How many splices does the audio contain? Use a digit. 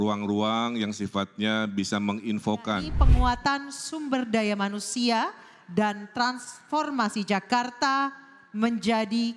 1